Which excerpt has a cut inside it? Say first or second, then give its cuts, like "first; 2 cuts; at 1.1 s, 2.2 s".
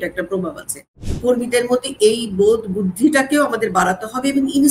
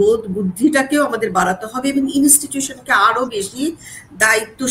first; 1 cut; at 1.0 s